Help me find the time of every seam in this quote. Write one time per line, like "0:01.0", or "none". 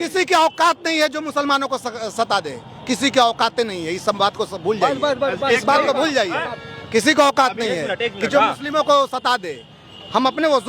none